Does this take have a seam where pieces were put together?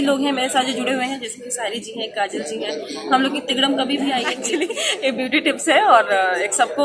yes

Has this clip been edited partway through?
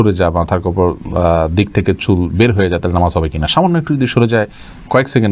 no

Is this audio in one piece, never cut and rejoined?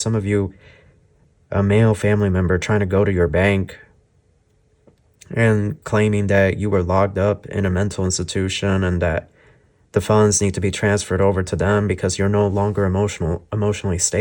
yes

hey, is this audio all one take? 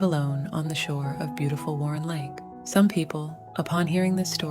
no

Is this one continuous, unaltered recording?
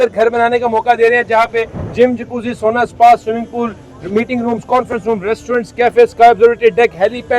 yes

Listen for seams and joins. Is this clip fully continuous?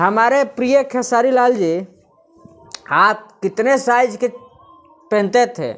yes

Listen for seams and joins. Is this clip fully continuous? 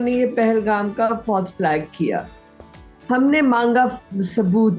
yes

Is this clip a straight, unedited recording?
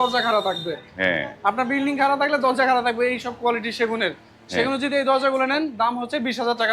yes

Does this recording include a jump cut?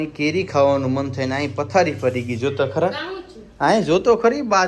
no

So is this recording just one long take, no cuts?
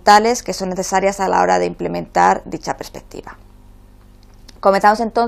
yes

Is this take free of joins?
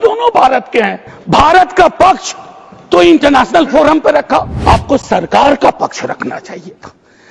no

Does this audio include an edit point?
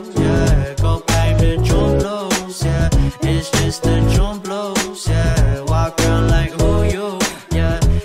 yes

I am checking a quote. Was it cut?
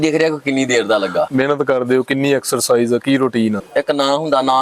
yes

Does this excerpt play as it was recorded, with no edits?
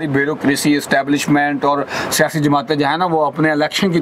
yes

